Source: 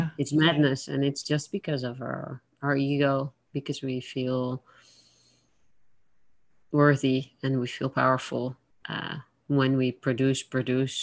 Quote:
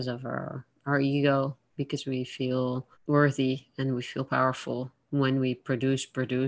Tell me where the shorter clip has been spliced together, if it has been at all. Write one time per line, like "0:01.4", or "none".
0:02.9
0:05.0